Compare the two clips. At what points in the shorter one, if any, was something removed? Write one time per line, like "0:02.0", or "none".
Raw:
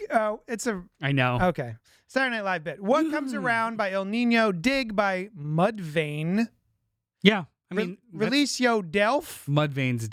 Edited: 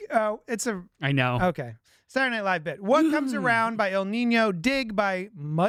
none